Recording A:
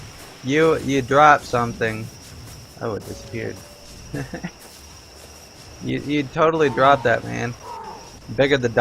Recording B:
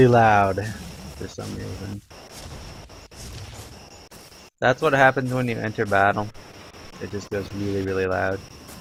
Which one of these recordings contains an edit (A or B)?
A